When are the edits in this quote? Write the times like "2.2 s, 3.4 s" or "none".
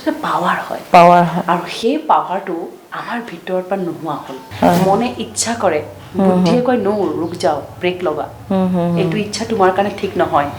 4.4 s